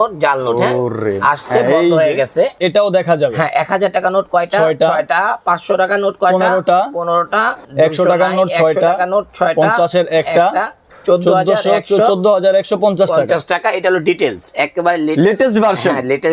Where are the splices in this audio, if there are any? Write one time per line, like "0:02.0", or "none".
0:02.6
0:07.6
0:10.8
0:14.5